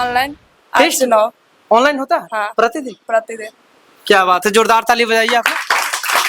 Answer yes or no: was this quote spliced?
no